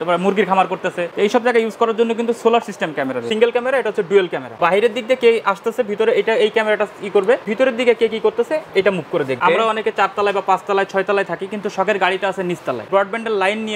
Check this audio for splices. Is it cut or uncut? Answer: cut